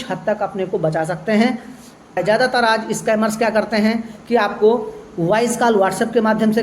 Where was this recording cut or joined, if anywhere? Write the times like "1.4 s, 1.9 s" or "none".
2.2 s